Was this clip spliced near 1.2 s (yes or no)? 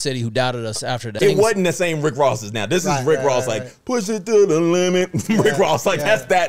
yes